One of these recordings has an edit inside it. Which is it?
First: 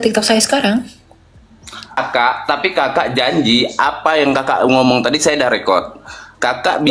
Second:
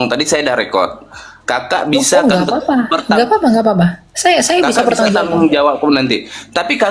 first; 1 cut; at 2.0 s

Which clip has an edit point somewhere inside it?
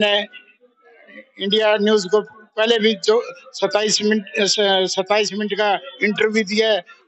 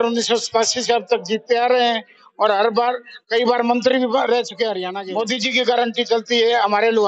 second; 1 cut; at 4.9 s

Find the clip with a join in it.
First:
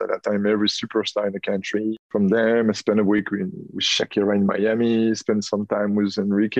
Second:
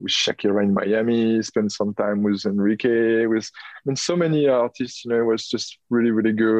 first; 1 cut; at 2.0 s

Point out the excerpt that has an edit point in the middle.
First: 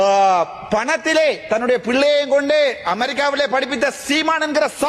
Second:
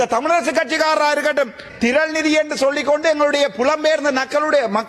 second; 1 cut; at 1.6 s

